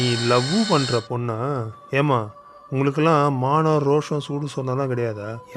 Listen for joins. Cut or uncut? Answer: uncut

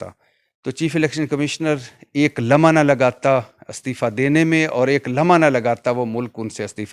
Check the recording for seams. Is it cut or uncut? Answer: uncut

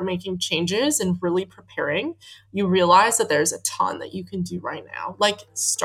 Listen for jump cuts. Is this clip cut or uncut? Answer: uncut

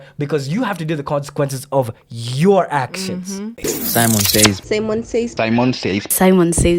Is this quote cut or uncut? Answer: cut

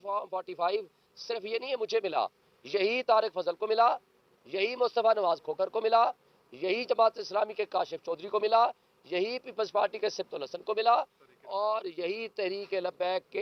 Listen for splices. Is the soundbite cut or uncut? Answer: uncut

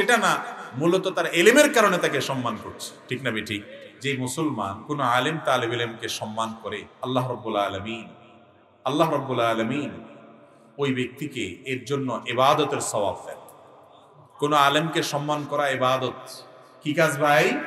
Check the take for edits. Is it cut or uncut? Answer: cut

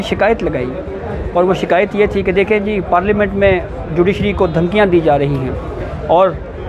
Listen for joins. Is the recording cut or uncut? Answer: uncut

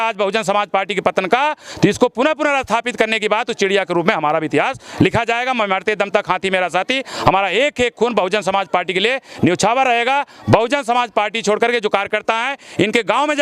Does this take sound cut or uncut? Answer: uncut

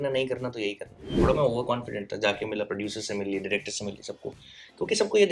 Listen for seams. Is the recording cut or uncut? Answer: cut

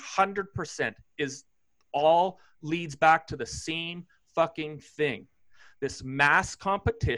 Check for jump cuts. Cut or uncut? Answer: uncut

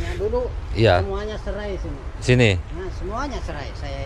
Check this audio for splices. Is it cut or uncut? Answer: uncut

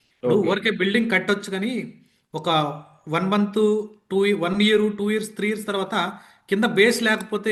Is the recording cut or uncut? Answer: uncut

